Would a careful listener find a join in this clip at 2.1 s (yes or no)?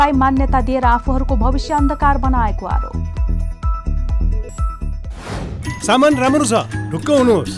no